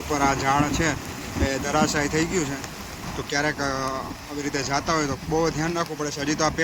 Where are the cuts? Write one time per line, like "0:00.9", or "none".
none